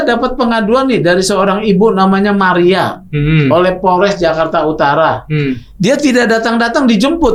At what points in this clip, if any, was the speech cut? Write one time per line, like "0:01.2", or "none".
none